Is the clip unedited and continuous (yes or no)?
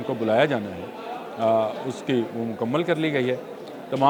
yes